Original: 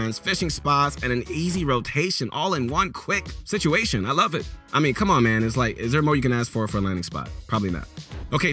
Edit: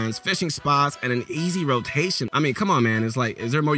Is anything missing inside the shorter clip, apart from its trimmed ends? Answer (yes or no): yes